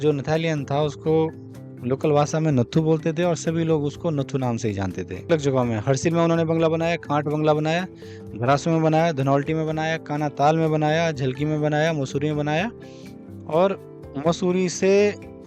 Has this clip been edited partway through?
yes; 1 cut; at 5.3 s

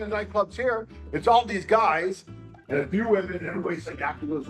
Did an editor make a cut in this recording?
yes; 1 cut; at 2.5 s

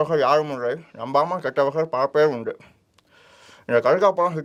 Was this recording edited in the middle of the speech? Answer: no; 0 cuts

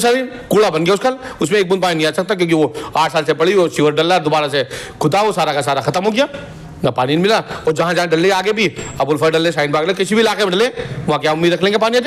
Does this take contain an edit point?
no; 0 cuts

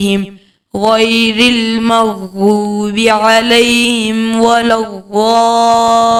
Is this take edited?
no; 0 cuts

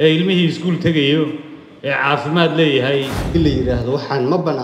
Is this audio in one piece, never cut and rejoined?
no; 1 cut; at 3.2 s

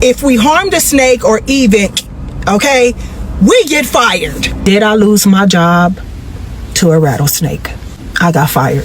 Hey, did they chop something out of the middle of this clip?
yes; 1 cut; at 4.6 s

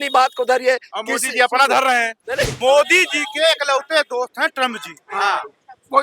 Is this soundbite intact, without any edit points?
no; 1 cut; at 2.5 s

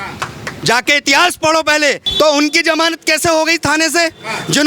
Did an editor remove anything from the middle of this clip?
yes; 1 cut; at 2.0 s

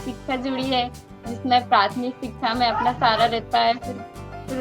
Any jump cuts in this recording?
no; 0 cuts

